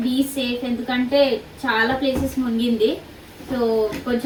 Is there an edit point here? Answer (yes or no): no